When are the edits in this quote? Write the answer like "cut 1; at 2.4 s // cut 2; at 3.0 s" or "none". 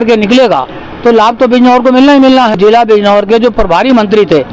cut 1; at 2.6 s